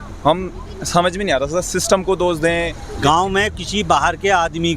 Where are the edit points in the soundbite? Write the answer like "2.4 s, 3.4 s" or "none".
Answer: 2.8 s